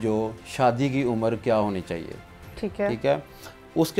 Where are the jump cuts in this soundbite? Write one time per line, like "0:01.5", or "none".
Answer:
none